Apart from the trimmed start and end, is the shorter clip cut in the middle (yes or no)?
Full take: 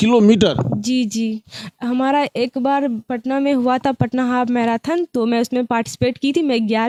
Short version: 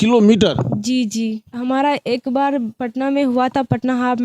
yes